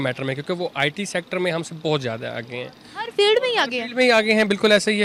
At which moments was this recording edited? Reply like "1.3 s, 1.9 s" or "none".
none